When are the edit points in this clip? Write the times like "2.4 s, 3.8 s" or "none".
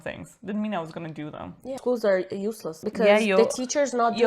1.7 s